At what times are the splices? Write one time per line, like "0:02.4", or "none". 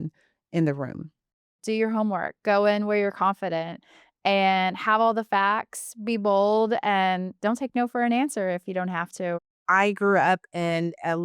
0:01.5
0:09.4